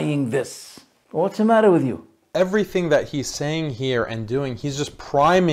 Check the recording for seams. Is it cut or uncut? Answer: cut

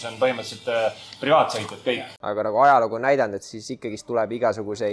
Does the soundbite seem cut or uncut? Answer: cut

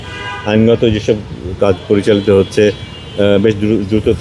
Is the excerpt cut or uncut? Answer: uncut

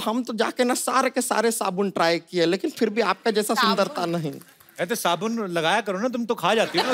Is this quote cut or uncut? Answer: uncut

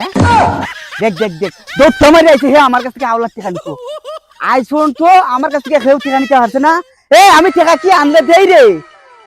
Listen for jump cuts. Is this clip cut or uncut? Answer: uncut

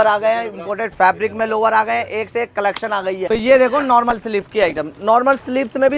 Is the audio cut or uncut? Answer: cut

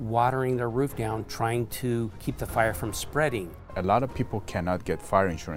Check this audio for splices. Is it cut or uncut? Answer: cut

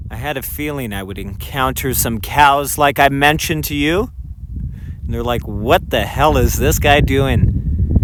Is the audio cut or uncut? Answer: uncut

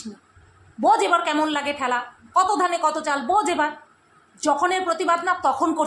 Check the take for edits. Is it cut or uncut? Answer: uncut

